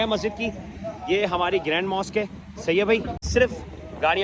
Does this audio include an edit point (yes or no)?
yes